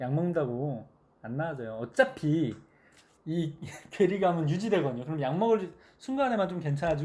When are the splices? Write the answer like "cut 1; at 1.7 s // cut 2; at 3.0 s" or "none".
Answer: none